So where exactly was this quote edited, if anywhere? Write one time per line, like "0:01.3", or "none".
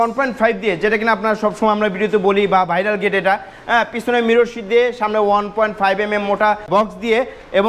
0:06.7

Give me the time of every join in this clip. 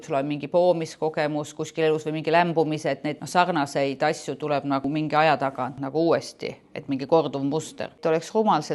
0:03.2
0:04.9
0:05.8
0:07.9

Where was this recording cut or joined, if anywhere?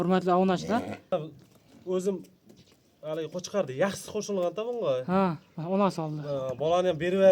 0:01.1

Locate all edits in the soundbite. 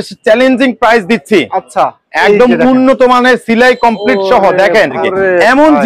0:04.9

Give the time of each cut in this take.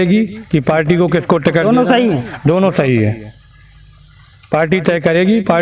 none

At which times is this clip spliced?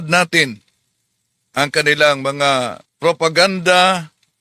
0:02.8

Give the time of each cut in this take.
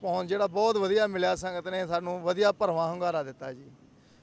none

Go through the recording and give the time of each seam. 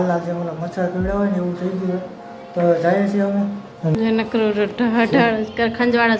0:03.9

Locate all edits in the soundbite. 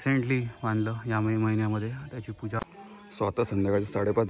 0:02.6

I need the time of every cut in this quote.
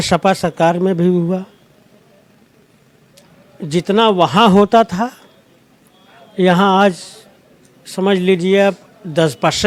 none

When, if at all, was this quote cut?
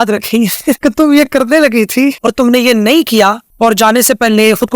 0:00.8
0:02.2
0:03.4

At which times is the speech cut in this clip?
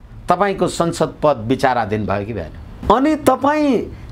0:02.7

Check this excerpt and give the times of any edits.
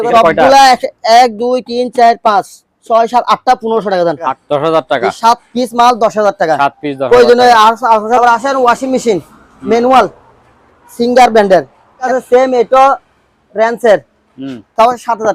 0:04.3
0:08.2
0:12.1

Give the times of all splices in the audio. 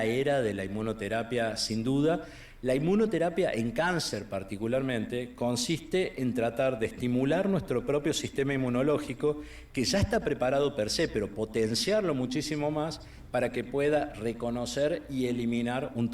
none

